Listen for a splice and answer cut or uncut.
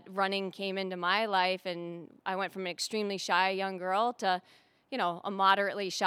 uncut